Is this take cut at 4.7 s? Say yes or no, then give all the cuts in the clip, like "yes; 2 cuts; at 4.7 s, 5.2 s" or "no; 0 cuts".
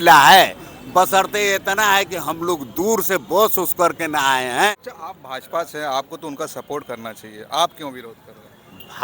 yes; 1 cut; at 4.7 s